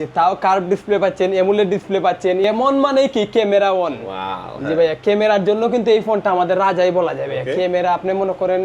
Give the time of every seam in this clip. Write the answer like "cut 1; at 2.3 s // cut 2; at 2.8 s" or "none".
cut 1; at 2.4 s